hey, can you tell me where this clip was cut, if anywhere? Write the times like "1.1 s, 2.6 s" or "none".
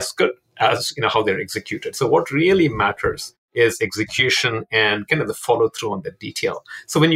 none

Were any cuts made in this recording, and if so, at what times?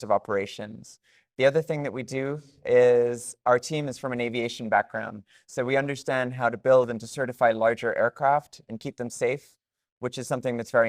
none

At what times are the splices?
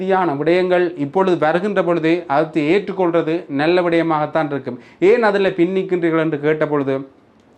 none

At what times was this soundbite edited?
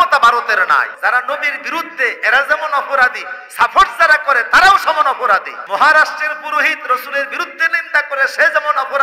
0.9 s, 5.5 s

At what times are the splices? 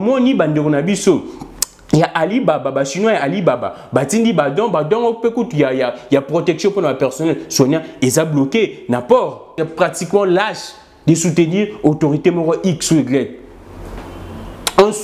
9.5 s

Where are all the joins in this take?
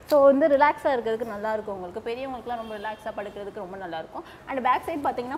none

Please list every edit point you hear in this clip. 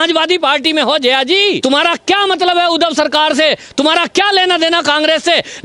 1.6 s

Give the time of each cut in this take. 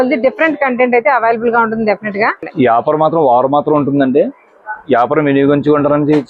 2.4 s

